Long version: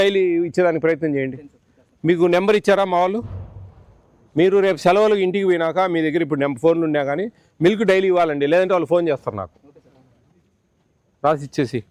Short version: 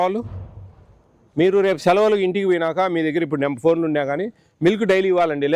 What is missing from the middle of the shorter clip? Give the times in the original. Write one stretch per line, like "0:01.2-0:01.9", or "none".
none